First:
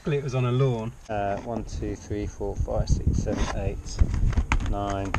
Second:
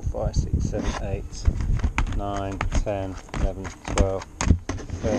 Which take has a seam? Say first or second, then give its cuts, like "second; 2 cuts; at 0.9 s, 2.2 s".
first; 1 cut; at 1.0 s